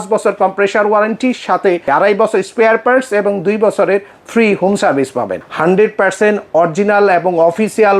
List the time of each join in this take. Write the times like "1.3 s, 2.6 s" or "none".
1.9 s, 5.4 s